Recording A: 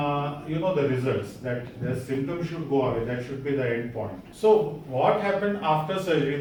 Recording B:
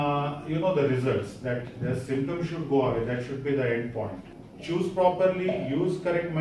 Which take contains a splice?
B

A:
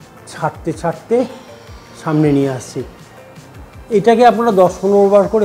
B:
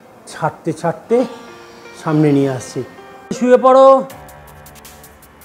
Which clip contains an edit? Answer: B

